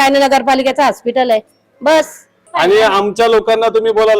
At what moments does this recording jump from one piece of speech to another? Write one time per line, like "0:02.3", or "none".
0:02.4